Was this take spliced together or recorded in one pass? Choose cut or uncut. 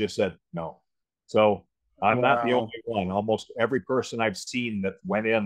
uncut